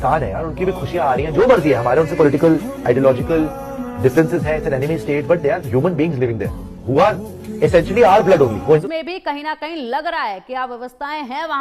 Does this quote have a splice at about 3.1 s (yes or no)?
no